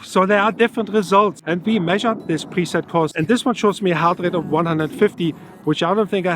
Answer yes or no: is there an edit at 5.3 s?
no